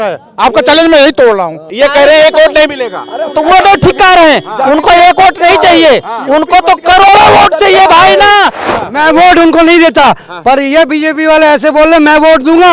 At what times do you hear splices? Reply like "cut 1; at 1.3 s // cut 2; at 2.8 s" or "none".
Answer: cut 1; at 1.7 s // cut 2; at 8.6 s